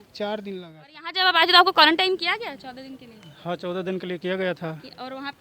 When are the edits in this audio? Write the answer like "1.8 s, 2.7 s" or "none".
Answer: 1.2 s